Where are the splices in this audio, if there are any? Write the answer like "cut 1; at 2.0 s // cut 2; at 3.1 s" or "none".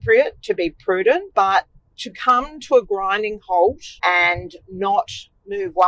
cut 1; at 1.3 s // cut 2; at 3.9 s